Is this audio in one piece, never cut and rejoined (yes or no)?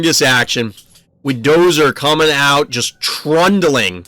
yes